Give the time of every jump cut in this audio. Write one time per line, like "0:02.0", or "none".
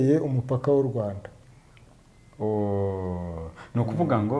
none